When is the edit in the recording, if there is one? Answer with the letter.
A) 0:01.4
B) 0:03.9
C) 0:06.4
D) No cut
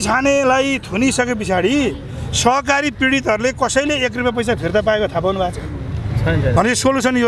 D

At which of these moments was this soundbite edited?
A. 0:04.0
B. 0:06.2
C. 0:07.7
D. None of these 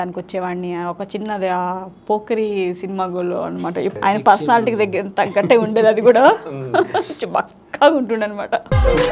A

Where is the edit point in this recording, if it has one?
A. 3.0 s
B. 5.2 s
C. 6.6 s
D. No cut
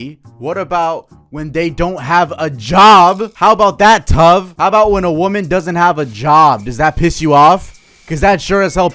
D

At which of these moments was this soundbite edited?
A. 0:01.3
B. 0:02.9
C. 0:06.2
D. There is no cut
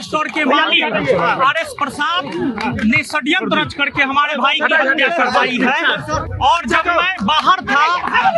D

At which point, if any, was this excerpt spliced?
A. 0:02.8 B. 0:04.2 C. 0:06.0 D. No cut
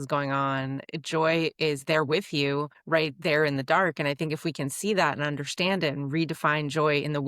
A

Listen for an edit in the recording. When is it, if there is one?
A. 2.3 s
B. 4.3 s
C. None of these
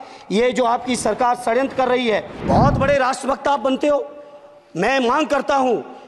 A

